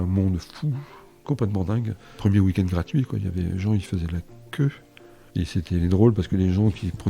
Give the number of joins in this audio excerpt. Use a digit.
1